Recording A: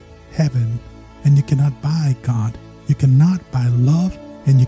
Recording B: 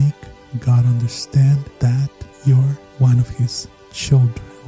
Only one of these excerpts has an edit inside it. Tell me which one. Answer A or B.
B